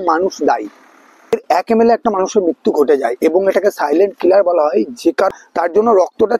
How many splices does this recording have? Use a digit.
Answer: 2